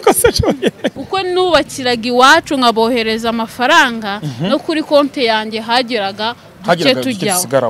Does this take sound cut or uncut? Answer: cut